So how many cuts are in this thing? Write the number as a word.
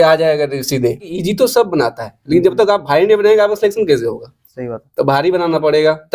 one